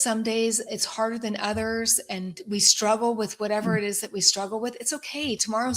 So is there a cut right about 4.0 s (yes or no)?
no